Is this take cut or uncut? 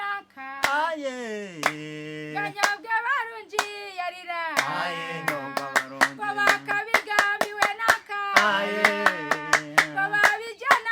uncut